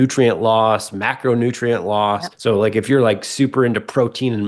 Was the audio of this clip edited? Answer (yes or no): yes